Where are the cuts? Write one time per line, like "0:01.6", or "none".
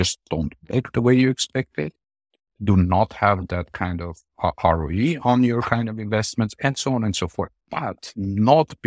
0:07.6